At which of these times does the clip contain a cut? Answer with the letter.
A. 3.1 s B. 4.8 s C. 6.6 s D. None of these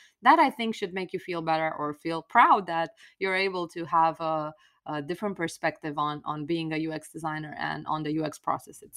D